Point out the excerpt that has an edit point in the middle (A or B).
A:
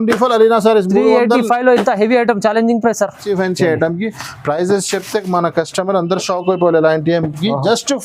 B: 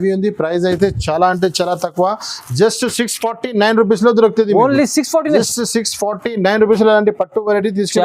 A